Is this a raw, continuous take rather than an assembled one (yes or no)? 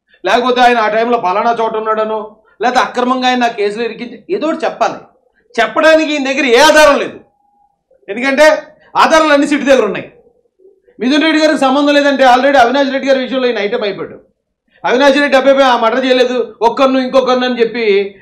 yes